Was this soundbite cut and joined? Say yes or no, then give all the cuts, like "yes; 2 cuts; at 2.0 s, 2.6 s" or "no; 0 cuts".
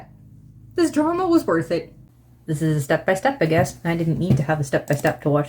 yes; 1 cut; at 2.0 s